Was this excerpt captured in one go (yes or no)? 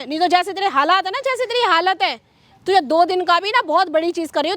yes